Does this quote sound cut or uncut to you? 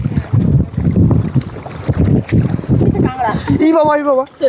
uncut